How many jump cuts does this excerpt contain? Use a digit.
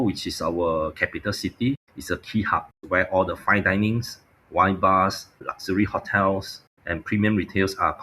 2